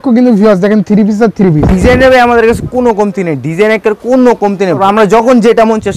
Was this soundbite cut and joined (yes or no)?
yes